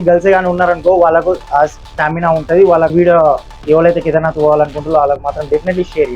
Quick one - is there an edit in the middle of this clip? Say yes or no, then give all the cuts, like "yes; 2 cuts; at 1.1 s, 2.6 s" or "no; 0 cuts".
yes; 1 cut; at 2.9 s